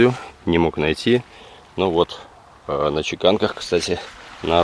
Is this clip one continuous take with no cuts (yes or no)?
yes